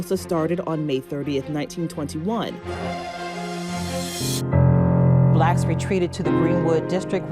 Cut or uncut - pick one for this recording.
cut